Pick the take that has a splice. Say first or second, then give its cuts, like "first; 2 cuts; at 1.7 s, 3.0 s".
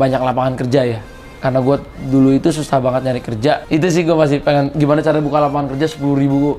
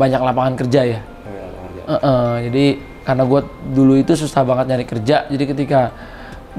first; 2 cuts; at 1.3 s, 3.6 s